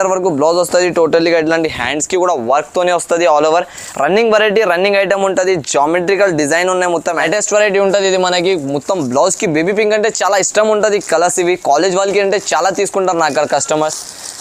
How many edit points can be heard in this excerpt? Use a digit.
1